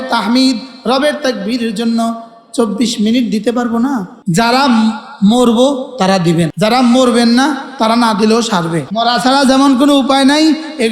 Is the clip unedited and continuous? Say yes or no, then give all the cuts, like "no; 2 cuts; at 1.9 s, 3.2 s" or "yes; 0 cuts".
no; 3 cuts; at 4.1 s, 6.5 s, 8.9 s